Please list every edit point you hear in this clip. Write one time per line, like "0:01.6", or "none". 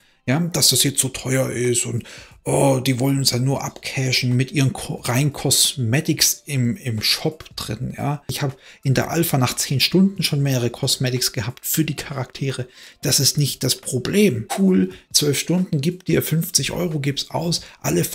0:08.3
0:14.5